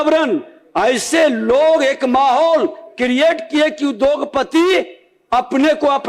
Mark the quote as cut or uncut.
uncut